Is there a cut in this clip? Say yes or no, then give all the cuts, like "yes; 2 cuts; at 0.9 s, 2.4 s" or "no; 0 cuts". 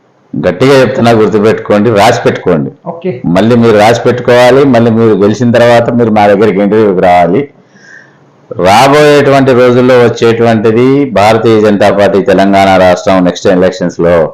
no; 0 cuts